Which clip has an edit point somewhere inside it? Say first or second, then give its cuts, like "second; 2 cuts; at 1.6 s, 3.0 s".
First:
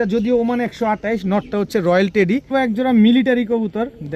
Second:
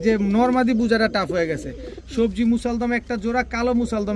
first; 1 cut; at 2.5 s